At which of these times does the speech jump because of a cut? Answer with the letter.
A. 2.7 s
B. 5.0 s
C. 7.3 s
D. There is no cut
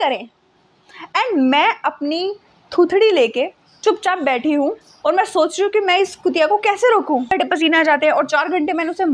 C